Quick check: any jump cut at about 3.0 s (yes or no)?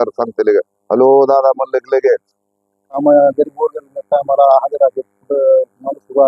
yes